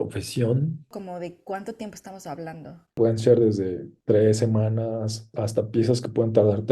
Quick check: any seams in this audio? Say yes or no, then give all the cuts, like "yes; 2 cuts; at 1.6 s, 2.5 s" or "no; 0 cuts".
yes; 4 cuts; at 0.9 s, 2.9 s, 3.9 s, 5.3 s